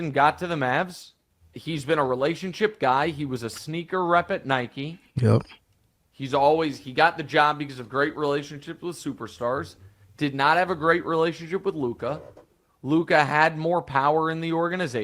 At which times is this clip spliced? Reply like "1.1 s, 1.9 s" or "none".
1.6 s

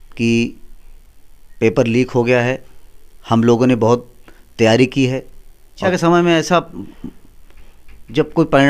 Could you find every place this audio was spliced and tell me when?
5.8 s

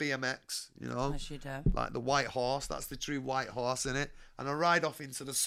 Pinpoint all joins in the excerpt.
none

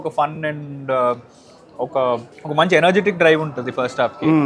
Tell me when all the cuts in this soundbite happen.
2.3 s

